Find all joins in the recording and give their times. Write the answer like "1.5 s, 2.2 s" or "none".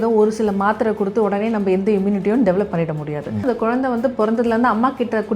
3.4 s